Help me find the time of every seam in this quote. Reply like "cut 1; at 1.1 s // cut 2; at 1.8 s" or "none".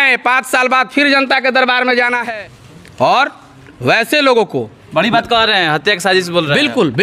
cut 1; at 2.3 s